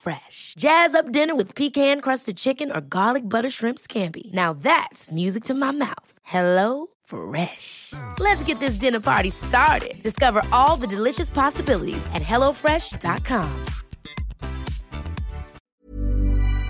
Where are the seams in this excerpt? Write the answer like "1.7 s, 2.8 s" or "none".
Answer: 15.6 s